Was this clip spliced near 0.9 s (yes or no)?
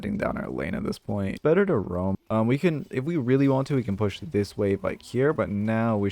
no